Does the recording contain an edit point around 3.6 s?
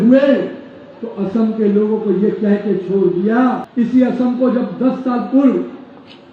yes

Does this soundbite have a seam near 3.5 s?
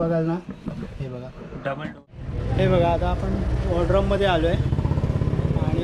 no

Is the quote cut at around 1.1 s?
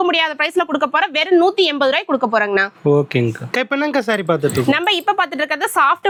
no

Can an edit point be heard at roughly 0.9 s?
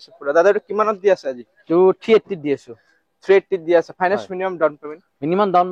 no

